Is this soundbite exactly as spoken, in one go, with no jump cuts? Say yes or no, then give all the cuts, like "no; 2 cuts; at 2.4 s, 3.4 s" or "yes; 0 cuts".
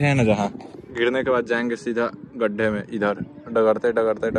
yes; 0 cuts